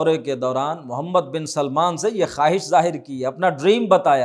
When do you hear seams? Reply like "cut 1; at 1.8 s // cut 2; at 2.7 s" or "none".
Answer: none

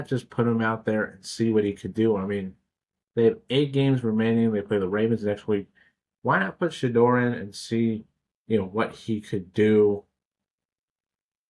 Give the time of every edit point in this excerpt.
none

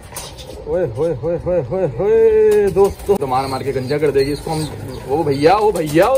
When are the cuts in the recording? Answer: cut 1; at 3.2 s

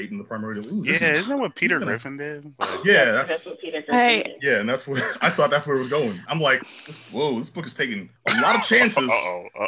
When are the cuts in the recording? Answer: cut 1; at 6.6 s // cut 2; at 8.1 s

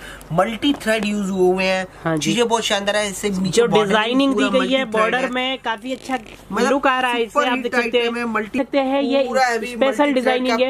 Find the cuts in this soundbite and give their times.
cut 1; at 8.5 s

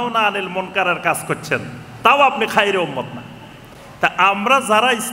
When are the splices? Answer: none

